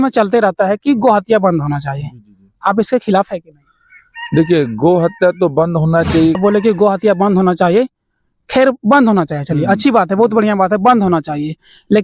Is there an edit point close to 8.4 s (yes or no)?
no